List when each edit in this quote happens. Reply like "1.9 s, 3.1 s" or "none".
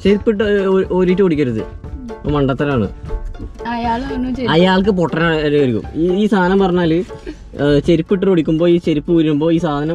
none